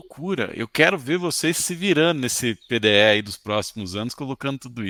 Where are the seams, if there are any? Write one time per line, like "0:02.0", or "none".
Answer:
none